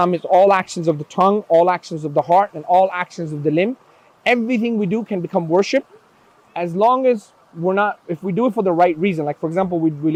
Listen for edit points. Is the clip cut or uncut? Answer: uncut